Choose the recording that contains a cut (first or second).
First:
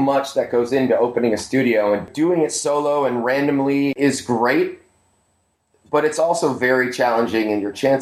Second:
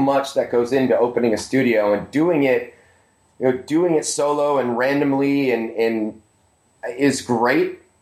first